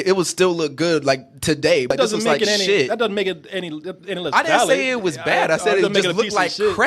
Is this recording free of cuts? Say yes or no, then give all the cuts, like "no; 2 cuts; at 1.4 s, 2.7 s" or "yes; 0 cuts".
no; 1 cut; at 1.9 s